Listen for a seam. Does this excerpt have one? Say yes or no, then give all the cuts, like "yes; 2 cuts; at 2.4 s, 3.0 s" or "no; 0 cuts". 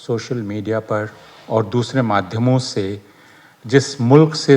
no; 0 cuts